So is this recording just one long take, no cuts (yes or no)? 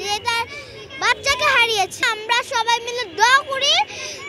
no